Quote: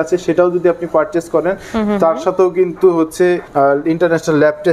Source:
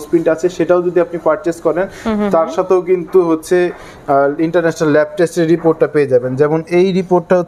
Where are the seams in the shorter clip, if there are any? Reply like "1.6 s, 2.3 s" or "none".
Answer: 3.5 s